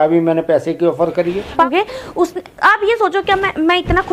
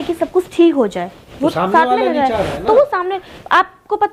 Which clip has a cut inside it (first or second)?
first